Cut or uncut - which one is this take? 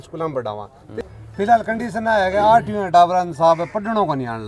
cut